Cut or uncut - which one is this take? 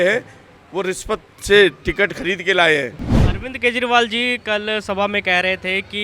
cut